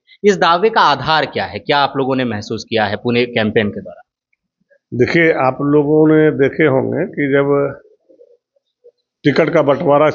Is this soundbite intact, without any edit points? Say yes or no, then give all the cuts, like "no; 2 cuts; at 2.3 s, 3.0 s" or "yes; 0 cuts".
yes; 0 cuts